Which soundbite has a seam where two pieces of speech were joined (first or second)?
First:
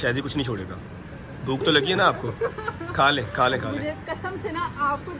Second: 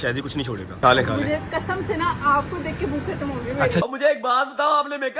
second